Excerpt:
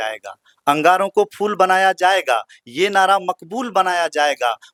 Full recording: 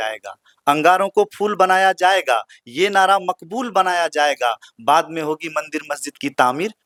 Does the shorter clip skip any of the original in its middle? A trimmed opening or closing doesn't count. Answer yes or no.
no